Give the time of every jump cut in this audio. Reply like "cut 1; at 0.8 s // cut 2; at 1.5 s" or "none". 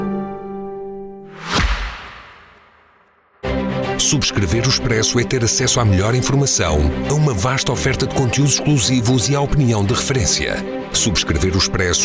cut 1; at 1.4 s